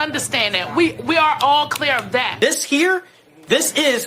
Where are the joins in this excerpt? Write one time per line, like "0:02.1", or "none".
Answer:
0:02.3